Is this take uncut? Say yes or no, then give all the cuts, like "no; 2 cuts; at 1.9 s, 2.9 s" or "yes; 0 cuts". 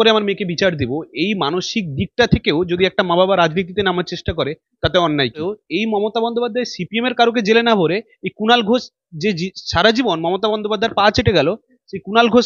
no; 1 cut; at 5.6 s